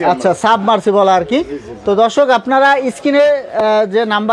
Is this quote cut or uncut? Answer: uncut